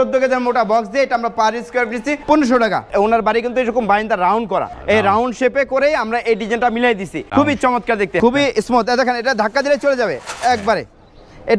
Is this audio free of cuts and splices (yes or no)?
no